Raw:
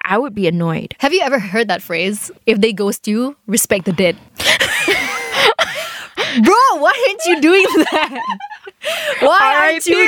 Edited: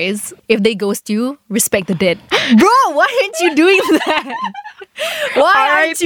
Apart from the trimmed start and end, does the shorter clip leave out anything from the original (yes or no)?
yes